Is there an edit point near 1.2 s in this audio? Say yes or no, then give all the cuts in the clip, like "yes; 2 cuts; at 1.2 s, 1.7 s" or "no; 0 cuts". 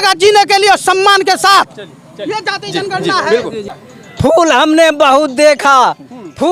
no; 1 cut; at 3.6 s